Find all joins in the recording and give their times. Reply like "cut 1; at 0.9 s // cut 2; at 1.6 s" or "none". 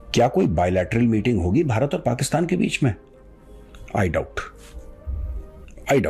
none